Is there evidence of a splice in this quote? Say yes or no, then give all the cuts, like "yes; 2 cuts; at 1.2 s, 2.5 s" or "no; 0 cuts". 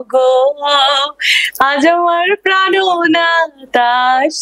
no; 0 cuts